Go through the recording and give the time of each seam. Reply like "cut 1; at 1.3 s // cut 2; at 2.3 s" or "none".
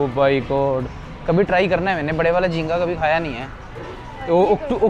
none